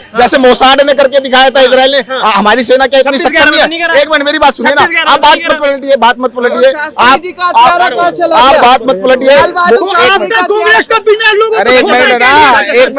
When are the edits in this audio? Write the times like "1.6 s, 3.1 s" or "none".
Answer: none